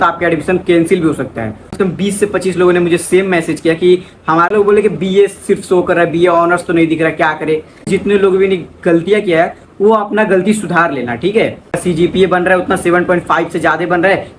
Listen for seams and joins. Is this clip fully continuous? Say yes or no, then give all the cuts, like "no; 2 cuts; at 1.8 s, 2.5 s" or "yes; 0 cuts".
no; 4 cuts; at 1.7 s, 4.5 s, 7.9 s, 11.7 s